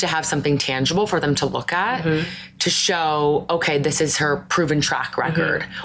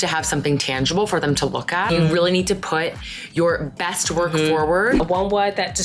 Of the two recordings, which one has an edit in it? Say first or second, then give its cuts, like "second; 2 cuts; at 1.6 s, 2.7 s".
second; 2 cuts; at 1.9 s, 5.0 s